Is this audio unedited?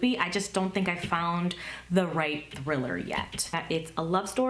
no; 1 cut; at 3.5 s

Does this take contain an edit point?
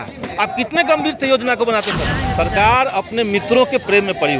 yes; 1 cut; at 2.1 s

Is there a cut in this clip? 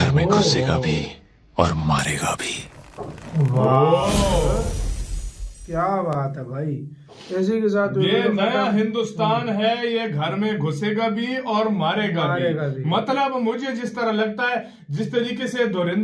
no; 0 cuts

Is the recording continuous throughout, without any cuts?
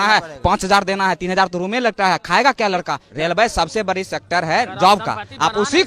no; 1 cut; at 3.0 s

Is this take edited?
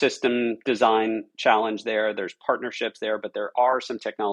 no; 0 cuts

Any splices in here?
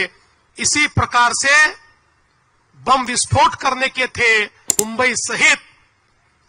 yes; 1 cut; at 4.7 s

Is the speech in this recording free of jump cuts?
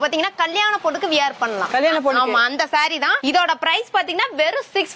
yes; 0 cuts

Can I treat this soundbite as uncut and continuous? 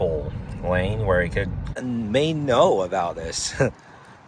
no; 1 cut; at 1.8 s

